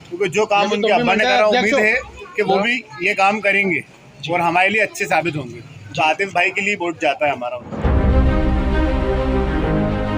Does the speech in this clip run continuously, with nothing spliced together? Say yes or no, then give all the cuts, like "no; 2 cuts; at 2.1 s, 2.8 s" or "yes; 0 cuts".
no; 1 cut; at 7.7 s